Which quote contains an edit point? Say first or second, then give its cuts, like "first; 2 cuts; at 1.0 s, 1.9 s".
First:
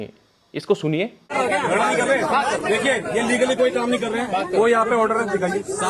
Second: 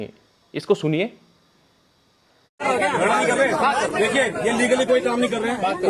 first; 2 cuts; at 1.3 s, 2.8 s